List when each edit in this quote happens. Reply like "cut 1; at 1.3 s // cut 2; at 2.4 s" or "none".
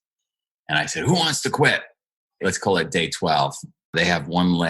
cut 1; at 2.4 s // cut 2; at 3.9 s